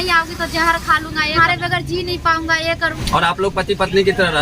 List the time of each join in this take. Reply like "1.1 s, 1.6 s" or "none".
1.4 s, 3.0 s